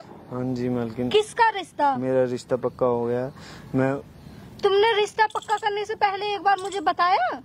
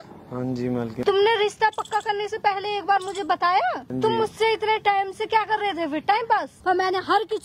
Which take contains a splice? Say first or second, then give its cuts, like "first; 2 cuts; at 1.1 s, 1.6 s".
second; 3 cuts; at 0.9 s, 3.9 s, 6.5 s